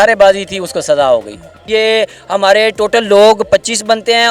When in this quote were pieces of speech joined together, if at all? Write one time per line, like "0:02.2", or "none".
0:01.6

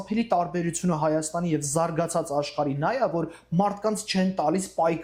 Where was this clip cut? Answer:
none

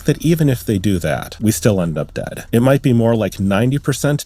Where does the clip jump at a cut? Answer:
0:01.3

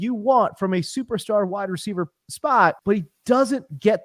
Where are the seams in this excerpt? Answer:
0:02.8

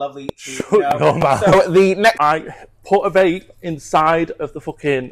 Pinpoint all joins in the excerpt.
0:02.2

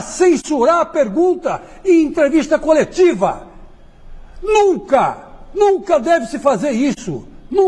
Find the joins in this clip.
none

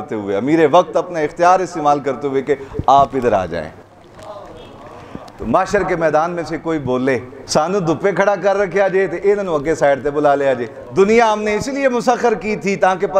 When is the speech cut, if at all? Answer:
0:05.3
0:07.4
0:10.8

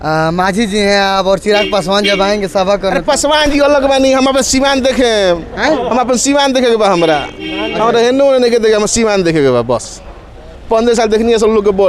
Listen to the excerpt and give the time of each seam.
none

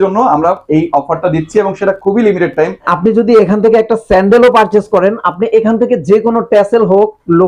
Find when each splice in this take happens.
0:02.9

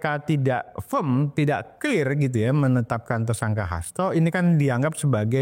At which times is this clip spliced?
none

